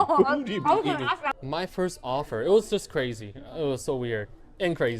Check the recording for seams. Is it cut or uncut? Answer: cut